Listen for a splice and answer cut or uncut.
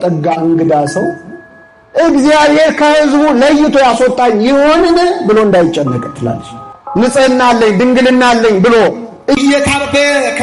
cut